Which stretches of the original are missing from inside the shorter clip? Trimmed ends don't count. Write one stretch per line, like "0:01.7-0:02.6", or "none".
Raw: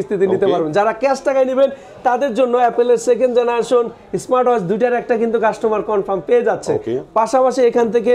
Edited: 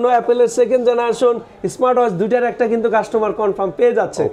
none